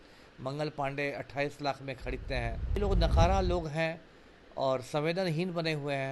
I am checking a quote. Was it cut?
yes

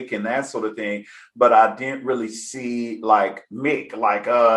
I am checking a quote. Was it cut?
no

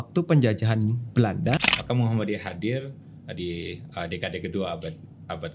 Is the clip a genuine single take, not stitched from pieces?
no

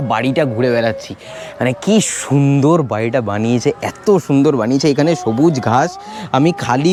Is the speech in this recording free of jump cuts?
yes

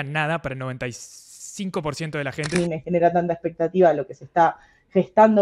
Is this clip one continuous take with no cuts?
no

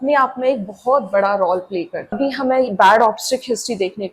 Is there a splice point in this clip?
yes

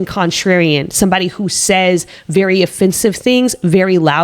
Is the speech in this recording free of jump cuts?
yes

